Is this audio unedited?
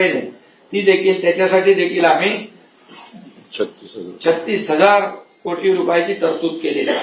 yes; 0 cuts

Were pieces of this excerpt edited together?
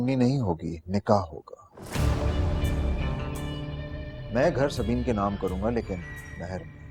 no; 0 cuts

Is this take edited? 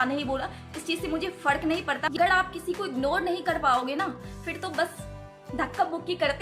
yes; 1 cut; at 2.1 s

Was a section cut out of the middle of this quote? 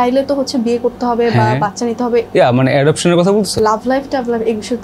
yes; 2 cuts; at 2.3 s, 3.6 s

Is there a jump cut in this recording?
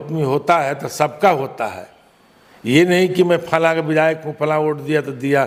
no; 0 cuts

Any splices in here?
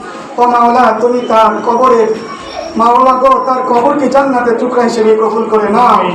no; 0 cuts

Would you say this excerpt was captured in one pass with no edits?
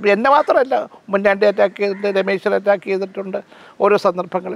yes; 0 cuts

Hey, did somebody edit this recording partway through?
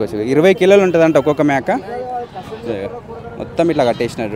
no; 0 cuts

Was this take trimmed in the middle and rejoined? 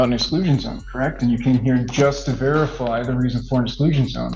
no; 0 cuts

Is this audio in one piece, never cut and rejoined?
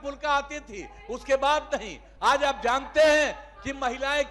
yes; 0 cuts

